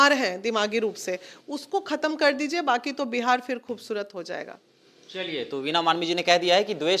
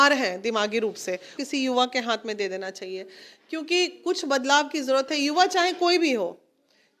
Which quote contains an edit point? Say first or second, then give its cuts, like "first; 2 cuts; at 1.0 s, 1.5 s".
second; 1 cut; at 1.4 s